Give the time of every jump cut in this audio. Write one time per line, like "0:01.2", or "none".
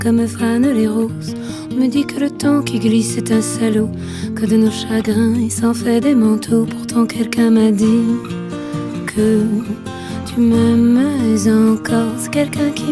none